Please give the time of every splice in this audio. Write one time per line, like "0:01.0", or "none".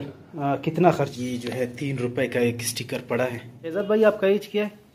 0:01.1
0:03.7